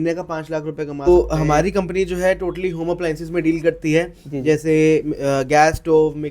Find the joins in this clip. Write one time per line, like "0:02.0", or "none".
0:01.1